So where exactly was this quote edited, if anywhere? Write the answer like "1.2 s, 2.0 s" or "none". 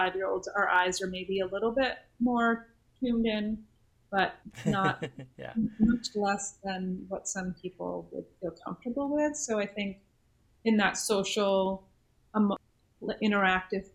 4.4 s, 12.6 s